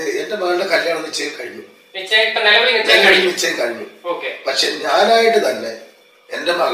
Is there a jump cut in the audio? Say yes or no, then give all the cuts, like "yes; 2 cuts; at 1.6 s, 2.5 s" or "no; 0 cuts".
no; 0 cuts